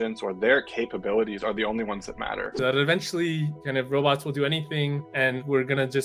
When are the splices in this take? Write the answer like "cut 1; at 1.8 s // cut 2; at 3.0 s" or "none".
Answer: cut 1; at 2.5 s